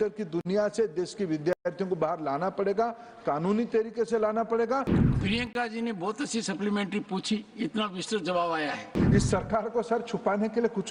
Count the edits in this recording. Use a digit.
2